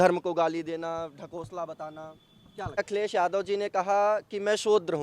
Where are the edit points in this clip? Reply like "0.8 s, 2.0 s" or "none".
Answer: 2.8 s